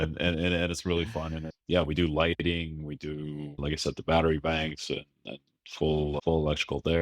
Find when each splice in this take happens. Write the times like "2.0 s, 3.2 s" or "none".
1.5 s